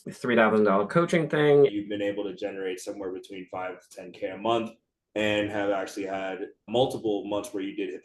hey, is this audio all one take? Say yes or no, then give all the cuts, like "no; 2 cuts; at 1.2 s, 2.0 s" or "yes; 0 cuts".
no; 1 cut; at 1.7 s